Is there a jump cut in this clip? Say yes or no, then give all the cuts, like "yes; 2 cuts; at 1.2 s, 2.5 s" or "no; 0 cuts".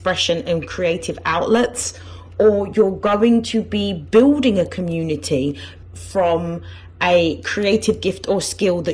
yes; 1 cut; at 5.7 s